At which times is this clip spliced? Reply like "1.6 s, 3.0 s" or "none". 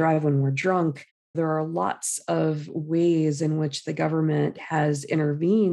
1.3 s